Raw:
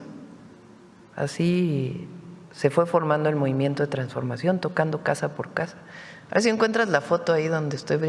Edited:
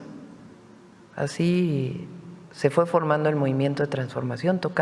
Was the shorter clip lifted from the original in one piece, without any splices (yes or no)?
yes